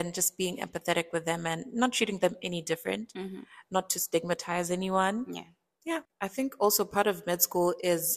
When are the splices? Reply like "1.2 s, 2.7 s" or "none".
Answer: 6.1 s